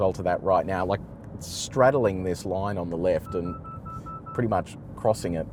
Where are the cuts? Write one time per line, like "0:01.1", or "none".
none